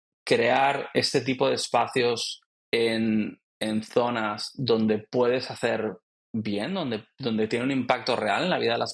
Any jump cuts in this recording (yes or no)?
no